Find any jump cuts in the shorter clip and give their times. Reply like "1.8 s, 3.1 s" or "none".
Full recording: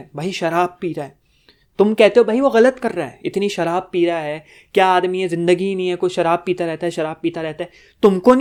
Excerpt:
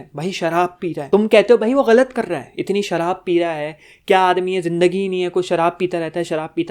1.0 s

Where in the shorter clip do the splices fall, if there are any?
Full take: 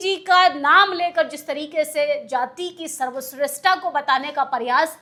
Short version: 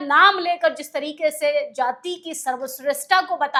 none

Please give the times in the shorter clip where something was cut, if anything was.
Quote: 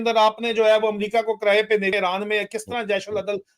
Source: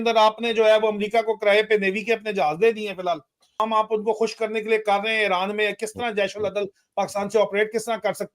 1.9 s

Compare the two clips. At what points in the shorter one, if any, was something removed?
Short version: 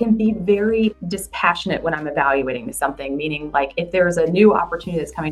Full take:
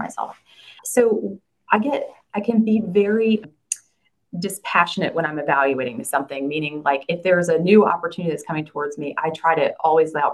1.0 s

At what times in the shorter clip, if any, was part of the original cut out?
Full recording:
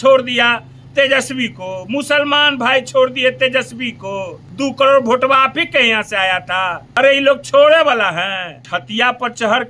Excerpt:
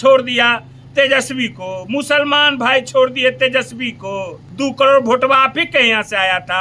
none

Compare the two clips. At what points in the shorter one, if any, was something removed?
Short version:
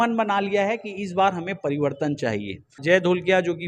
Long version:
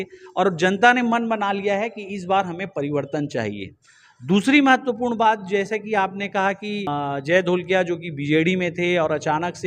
2.8 s

